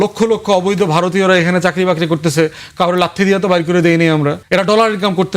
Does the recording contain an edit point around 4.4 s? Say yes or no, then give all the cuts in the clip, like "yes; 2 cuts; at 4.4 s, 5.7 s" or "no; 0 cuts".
yes; 1 cut; at 4.4 s